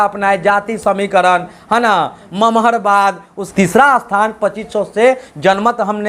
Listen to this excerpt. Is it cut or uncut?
cut